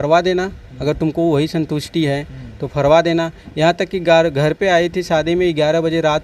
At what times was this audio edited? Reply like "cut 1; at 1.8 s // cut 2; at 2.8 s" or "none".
none